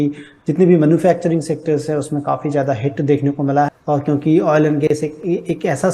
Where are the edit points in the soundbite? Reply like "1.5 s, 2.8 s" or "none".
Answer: 3.7 s

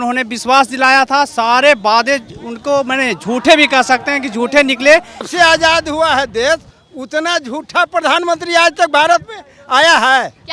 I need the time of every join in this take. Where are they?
5.3 s

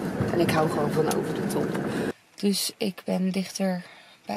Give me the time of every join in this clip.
2.1 s

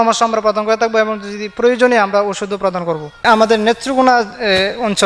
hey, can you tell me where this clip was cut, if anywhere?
3.2 s

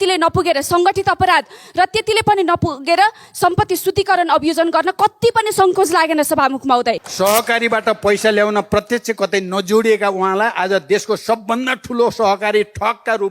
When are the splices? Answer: 7.1 s

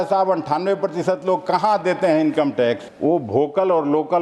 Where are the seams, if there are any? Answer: 2.9 s

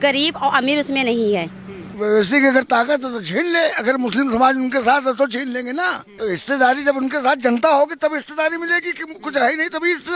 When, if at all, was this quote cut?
1.9 s, 6.1 s

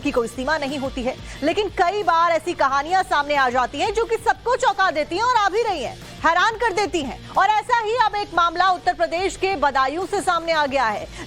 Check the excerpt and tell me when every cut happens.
3.6 s

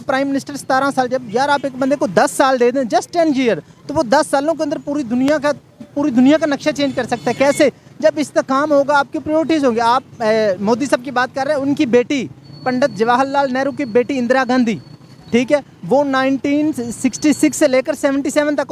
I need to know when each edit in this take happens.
none

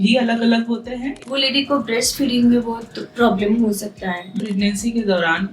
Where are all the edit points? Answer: 1.2 s, 4.3 s

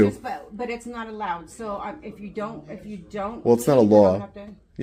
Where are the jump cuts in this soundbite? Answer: none

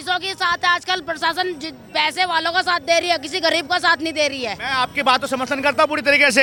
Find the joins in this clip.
none

